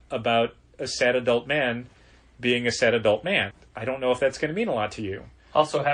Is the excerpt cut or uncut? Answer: cut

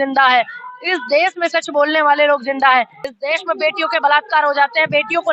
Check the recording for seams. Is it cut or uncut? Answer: cut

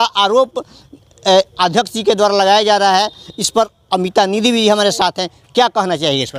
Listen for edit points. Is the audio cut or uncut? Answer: uncut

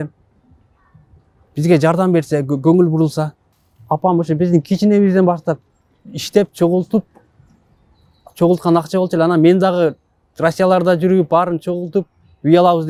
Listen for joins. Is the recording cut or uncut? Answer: uncut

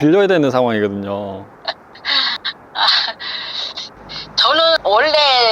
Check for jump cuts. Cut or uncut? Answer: cut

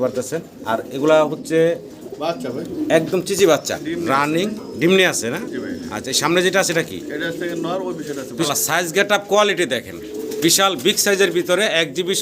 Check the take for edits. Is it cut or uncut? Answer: cut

